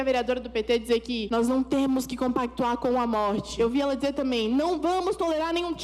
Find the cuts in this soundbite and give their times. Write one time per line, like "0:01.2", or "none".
0:01.2
0:03.5